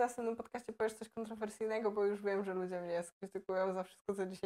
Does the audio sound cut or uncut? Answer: uncut